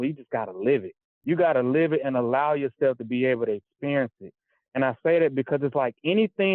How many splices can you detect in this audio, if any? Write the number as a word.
one